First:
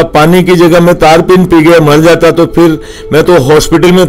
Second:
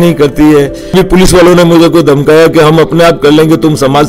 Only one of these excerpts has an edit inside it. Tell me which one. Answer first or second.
second